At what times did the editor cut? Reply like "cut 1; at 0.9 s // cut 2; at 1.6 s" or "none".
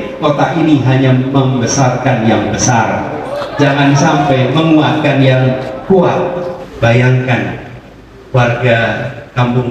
cut 1; at 6.6 s